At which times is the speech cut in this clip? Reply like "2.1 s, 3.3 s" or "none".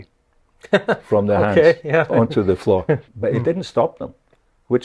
3.1 s